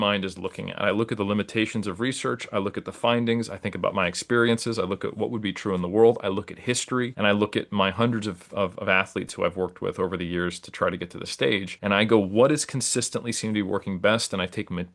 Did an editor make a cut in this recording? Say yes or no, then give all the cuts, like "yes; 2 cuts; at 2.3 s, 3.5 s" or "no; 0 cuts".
no; 0 cuts